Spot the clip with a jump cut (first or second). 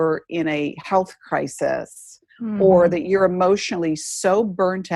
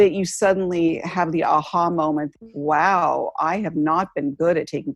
second